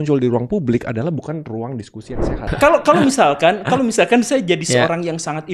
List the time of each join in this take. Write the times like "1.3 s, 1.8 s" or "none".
2.5 s

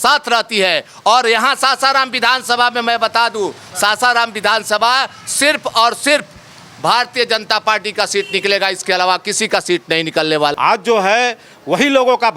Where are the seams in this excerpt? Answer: 10.5 s

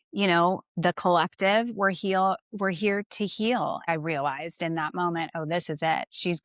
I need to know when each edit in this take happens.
3.8 s

